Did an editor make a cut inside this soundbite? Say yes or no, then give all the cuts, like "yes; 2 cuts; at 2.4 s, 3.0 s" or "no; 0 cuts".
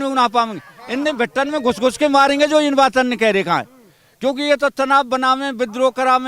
no; 0 cuts